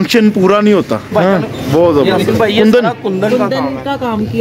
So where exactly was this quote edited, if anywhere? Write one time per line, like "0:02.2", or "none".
0:02.2